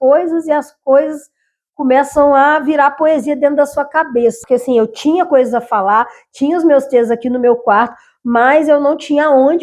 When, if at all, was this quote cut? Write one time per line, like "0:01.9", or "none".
0:04.4